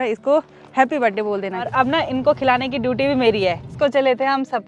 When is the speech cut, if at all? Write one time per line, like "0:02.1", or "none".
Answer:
0:01.7
0:03.7